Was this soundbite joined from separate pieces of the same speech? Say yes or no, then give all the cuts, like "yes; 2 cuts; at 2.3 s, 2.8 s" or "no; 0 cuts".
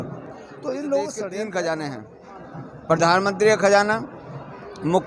yes; 1 cut; at 1.3 s